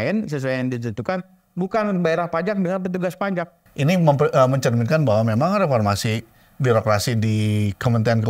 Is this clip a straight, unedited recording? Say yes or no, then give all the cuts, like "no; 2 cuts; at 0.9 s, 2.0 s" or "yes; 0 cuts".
no; 1 cut; at 3.6 s